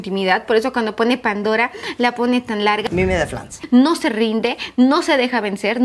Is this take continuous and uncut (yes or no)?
no